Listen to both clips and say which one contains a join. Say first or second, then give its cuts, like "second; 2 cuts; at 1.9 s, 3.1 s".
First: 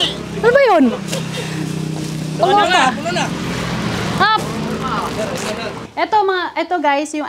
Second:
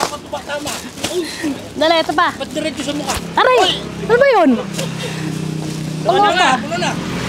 first; 1 cut; at 5.8 s